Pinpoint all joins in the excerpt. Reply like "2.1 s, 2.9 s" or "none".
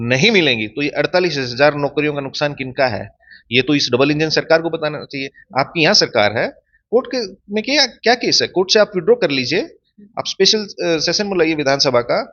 none